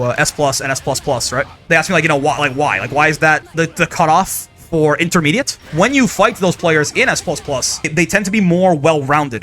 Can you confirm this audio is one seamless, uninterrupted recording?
no; 4 cuts; at 1.6 s, 3.4 s, 5.5 s, 7.9 s

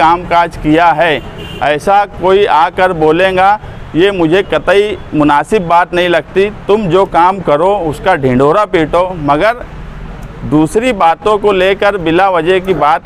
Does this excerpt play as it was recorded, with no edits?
yes; 0 cuts

